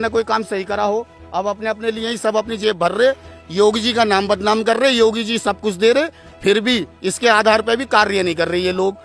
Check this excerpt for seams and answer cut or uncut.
uncut